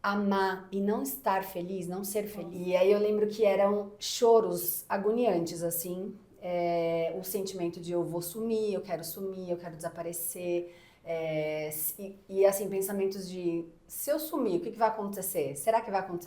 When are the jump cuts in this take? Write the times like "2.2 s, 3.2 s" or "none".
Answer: 2.4 s